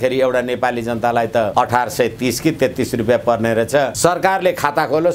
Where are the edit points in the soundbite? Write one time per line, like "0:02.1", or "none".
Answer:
0:01.5
0:03.9